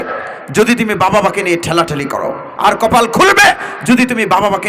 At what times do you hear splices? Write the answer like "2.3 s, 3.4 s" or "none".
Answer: none